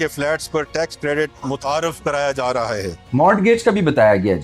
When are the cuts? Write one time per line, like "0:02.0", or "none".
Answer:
none